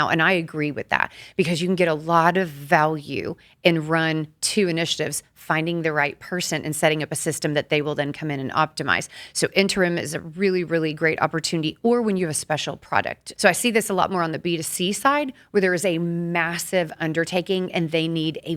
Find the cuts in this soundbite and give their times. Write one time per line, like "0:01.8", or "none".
0:13.2